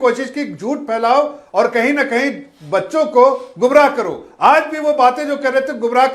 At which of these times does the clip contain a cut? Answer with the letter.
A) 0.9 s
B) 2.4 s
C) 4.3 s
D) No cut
D